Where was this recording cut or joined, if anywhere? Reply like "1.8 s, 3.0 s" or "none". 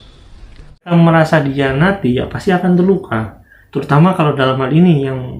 0.9 s